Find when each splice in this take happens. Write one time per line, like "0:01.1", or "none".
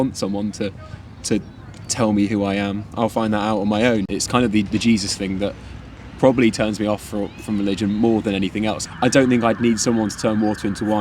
0:04.1
0:08.8